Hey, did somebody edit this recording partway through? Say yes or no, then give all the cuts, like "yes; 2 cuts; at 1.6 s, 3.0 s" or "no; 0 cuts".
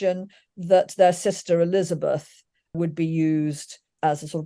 yes; 1 cut; at 2.8 s